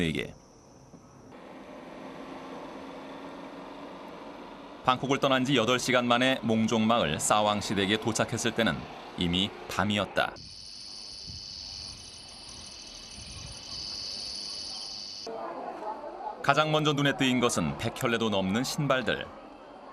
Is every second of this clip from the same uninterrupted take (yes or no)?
no